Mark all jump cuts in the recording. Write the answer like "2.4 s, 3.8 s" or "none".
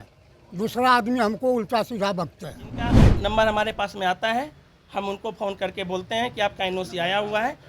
3.1 s